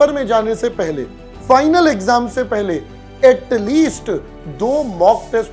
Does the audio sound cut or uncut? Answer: uncut